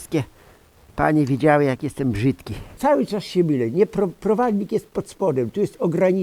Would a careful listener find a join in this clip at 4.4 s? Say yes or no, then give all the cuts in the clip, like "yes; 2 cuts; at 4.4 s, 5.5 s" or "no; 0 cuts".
no; 1 cut; at 2.7 s